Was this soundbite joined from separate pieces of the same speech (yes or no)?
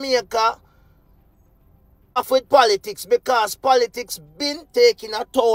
yes